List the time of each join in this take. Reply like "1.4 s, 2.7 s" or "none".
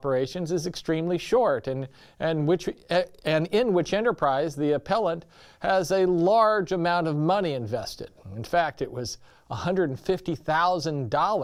none